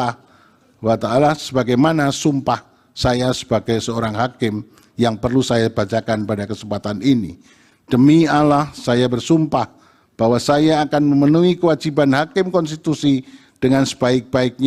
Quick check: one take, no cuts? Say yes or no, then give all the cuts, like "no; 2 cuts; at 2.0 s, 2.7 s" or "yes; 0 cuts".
yes; 0 cuts